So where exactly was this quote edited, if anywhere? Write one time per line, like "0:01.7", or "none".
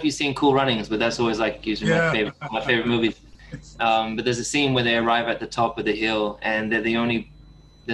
none